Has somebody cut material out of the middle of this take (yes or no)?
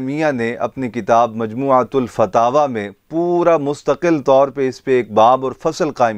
no